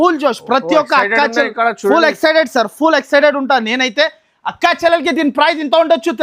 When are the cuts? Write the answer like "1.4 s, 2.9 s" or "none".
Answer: none